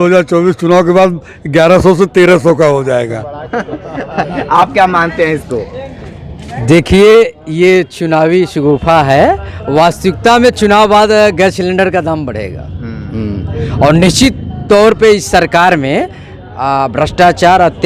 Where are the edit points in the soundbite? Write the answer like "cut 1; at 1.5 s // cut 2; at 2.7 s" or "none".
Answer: none